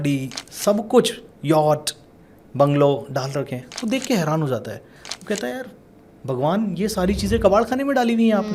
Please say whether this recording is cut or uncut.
uncut